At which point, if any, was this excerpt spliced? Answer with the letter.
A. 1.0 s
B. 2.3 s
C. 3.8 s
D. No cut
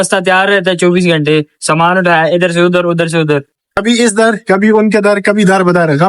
C